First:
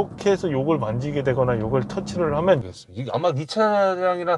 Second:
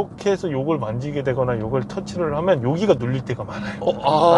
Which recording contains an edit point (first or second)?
first